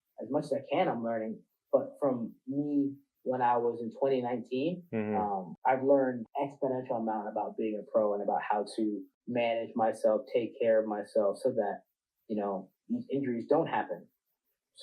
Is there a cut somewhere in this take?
yes; 3 cuts; at 5.5 s, 6.2 s, 9.1 s

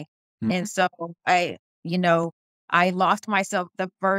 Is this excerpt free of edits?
yes; 0 cuts

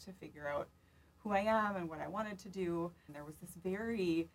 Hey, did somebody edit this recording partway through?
yes; 1 cut; at 3.2 s

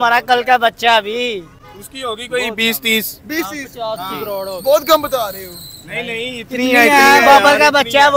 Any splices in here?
no; 0 cuts

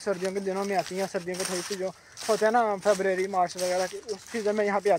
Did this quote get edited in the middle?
no; 0 cuts

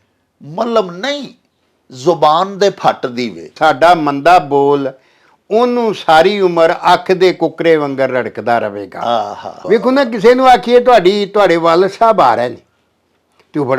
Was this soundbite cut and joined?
yes; 2 cuts; at 3.5 s, 9.6 s

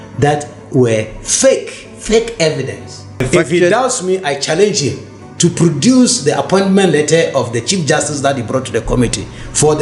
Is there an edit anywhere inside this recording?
yes; 1 cut; at 3.2 s

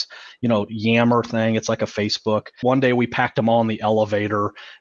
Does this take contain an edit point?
yes; 1 cut; at 2.5 s

